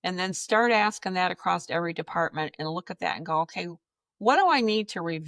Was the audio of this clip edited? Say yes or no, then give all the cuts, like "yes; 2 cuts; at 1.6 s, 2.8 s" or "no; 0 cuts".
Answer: no; 0 cuts